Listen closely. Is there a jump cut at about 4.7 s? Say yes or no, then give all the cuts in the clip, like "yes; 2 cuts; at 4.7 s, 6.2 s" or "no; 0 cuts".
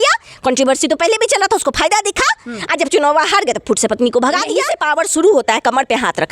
yes; 1 cut; at 4.7 s